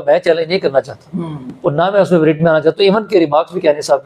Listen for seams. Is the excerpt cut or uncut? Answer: uncut